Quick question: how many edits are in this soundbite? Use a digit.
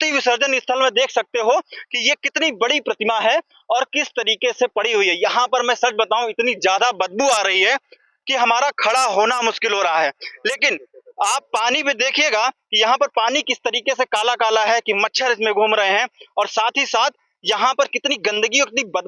0